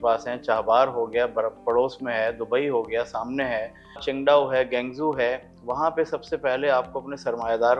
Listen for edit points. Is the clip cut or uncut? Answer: cut